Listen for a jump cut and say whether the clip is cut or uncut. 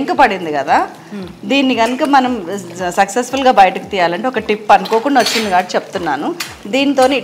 uncut